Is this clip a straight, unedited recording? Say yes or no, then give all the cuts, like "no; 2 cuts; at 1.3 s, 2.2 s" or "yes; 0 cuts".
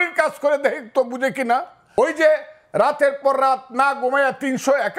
no; 1 cut; at 1.8 s